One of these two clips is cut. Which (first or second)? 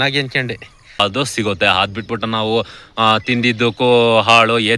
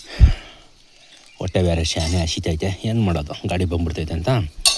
first